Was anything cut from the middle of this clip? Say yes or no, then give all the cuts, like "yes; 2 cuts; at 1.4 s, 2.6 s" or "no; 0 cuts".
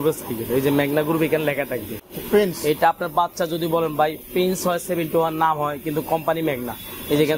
no; 0 cuts